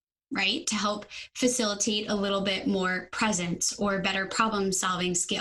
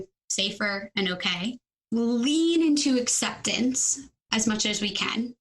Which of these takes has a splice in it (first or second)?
second